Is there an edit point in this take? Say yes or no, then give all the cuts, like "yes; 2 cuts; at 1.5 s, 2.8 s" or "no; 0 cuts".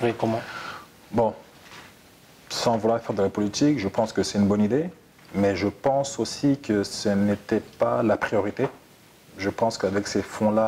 no; 0 cuts